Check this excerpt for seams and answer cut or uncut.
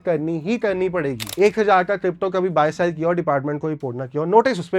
cut